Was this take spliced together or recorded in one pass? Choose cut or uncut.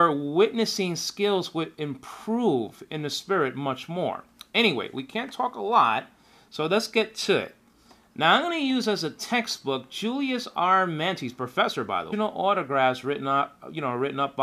uncut